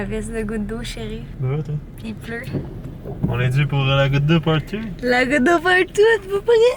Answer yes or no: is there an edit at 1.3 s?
yes